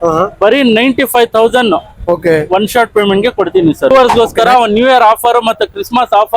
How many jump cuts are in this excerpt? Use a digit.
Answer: 1